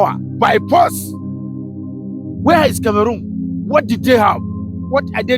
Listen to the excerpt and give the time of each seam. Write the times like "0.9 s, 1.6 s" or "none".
1.0 s, 2.4 s